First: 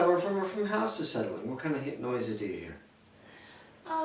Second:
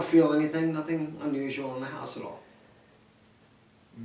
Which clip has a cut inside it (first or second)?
first